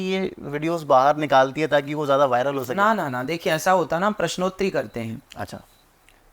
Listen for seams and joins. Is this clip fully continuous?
yes; 0 cuts

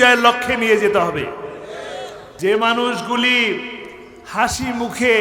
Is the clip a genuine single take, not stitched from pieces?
no; 1 cut; at 2.3 s

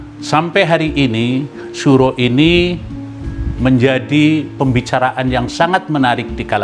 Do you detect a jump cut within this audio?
no; 0 cuts

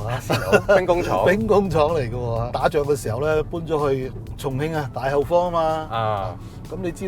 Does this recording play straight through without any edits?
yes; 0 cuts

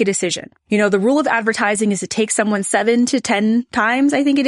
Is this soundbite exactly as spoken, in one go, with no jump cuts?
yes; 0 cuts

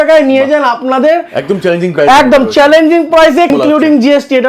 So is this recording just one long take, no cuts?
no; 1 cut; at 3.5 s

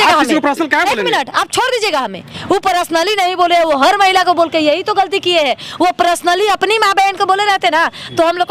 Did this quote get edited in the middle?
no; 0 cuts

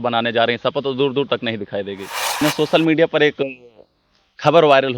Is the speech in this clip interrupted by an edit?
yes; 1 cut; at 2.4 s

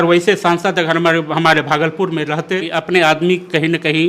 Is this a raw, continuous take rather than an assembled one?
no; 1 cut; at 2.7 s

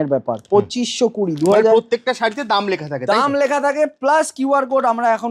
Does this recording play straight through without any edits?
yes; 0 cuts

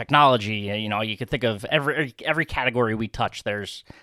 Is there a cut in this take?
no; 0 cuts

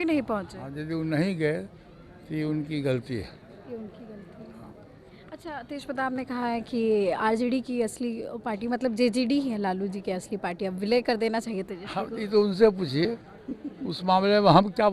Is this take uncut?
yes; 0 cuts

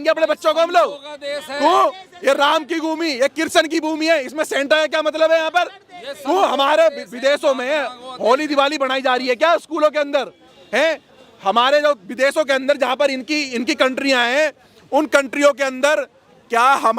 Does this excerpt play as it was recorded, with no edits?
yes; 0 cuts

